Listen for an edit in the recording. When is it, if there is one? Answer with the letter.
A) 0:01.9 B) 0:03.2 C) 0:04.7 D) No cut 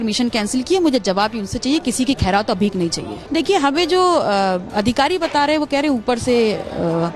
B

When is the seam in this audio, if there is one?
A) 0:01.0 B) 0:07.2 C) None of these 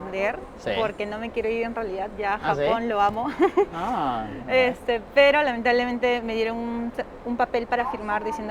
C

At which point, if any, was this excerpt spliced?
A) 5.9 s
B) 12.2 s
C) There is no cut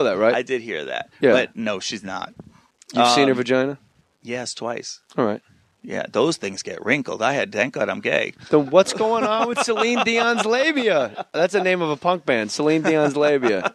C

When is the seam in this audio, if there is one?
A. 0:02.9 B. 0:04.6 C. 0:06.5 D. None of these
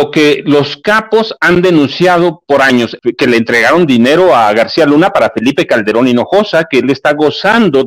A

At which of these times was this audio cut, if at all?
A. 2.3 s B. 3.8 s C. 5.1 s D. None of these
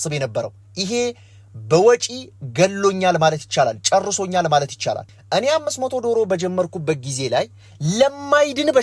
C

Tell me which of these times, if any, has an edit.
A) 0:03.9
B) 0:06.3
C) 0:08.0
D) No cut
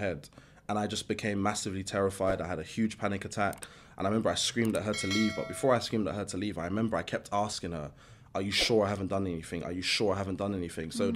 D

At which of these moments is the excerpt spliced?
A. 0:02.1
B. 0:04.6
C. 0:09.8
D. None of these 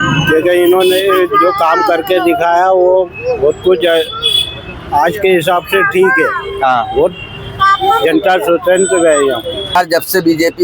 C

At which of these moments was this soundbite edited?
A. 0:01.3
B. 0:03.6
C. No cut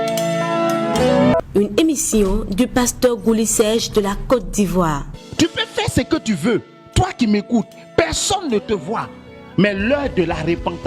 A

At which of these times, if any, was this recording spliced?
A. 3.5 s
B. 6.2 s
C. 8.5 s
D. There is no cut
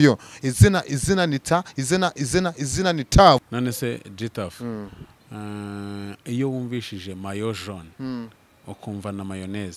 A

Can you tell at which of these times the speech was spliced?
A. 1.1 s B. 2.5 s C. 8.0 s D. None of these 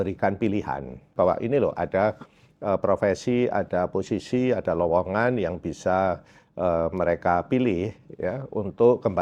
A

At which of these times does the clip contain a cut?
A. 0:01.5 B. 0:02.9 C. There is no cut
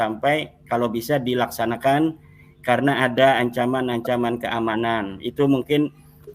C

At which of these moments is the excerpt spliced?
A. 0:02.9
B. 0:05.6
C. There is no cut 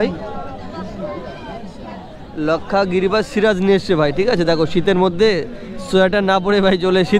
C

